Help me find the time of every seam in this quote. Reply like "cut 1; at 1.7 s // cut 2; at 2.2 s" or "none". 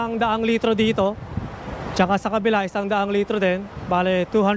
none